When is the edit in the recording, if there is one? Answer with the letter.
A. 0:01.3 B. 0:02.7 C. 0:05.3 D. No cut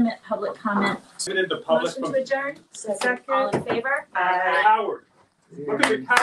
A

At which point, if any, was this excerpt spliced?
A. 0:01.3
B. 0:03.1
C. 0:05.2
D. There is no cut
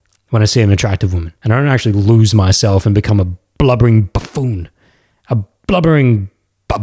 A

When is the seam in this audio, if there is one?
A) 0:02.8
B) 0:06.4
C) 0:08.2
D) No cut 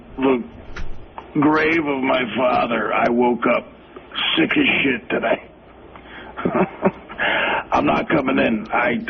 C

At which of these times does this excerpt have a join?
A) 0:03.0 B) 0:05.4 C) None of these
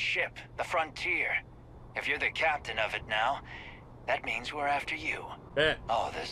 B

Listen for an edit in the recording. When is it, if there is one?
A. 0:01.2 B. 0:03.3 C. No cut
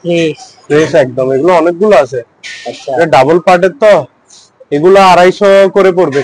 C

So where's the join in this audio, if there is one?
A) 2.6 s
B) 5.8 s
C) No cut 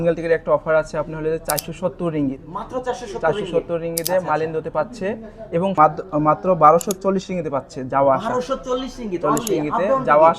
B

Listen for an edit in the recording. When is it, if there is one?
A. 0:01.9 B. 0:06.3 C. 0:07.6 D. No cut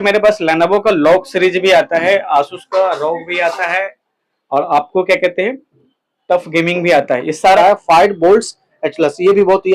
C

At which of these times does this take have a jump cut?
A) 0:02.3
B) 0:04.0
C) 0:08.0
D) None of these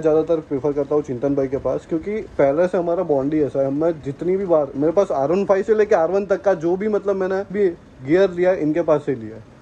D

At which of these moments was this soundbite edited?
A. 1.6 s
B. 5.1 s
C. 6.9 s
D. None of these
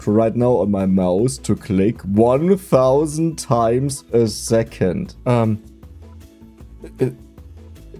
B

